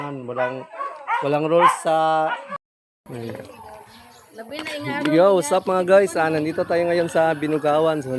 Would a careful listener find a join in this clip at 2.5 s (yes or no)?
yes